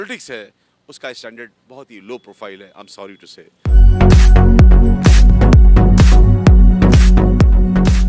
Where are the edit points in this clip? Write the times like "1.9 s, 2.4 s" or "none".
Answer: 3.6 s